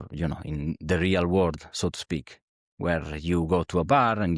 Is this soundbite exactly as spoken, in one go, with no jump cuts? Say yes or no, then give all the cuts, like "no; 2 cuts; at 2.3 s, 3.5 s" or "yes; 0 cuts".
yes; 0 cuts